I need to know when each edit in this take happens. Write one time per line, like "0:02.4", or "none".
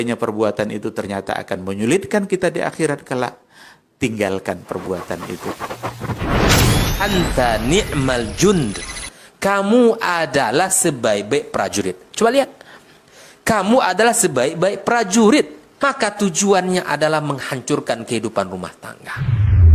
none